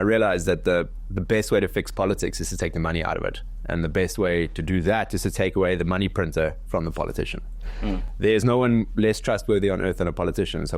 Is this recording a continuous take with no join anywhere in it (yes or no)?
yes